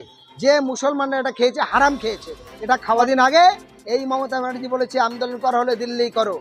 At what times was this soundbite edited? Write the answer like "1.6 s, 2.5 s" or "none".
3.0 s